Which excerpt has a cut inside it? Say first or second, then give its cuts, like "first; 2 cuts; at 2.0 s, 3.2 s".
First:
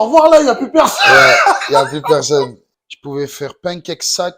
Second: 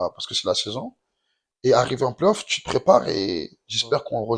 first; 1 cut; at 2.7 s